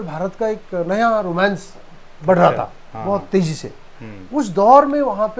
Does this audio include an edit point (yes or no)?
no